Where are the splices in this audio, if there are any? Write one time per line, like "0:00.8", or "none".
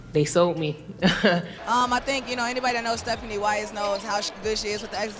0:01.5